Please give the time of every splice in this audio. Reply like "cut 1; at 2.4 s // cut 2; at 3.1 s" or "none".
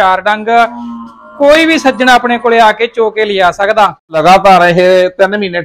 cut 1; at 4.2 s